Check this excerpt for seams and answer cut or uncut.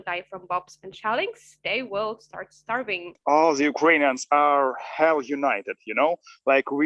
cut